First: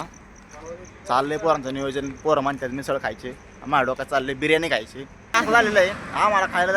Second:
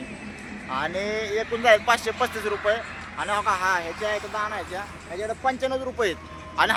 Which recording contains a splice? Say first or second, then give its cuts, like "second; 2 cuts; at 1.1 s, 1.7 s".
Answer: first; 1 cut; at 5.4 s